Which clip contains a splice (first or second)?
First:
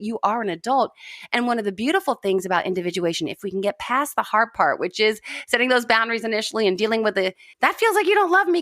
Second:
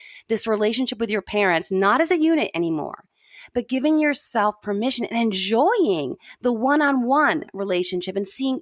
first